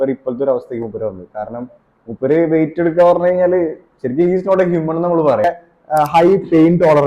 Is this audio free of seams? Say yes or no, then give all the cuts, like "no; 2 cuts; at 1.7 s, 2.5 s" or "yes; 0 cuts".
no; 1 cut; at 5.4 s